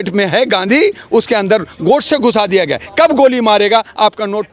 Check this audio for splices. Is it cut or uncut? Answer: uncut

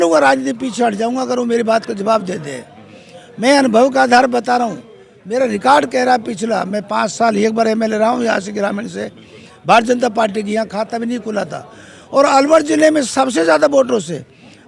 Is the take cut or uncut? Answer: uncut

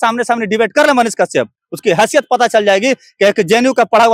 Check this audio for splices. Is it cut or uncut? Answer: uncut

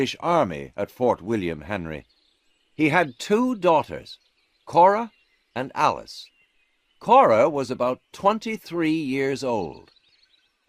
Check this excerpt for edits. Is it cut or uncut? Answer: uncut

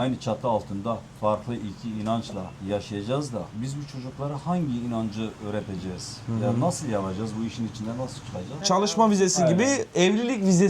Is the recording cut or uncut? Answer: cut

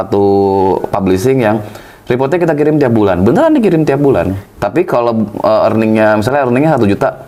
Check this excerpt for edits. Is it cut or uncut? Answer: uncut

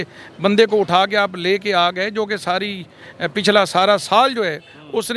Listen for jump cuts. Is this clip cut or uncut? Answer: uncut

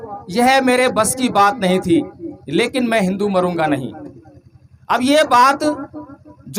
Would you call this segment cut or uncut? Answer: uncut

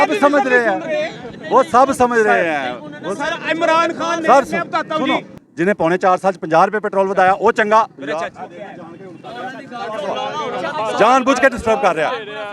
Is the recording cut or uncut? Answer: uncut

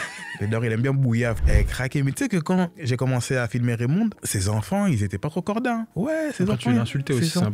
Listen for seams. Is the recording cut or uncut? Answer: cut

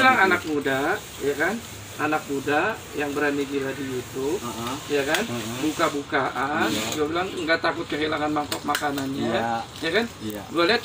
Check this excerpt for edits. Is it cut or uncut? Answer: uncut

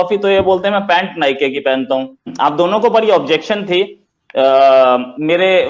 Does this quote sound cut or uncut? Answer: cut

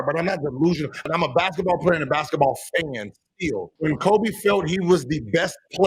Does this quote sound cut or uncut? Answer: cut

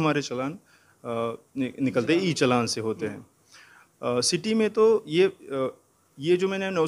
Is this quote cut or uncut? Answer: uncut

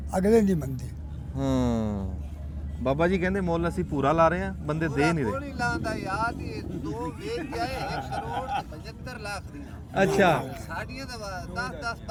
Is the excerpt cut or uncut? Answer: uncut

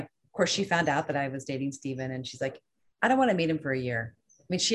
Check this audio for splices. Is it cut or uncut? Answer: uncut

